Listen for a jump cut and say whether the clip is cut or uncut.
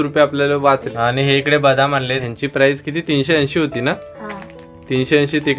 cut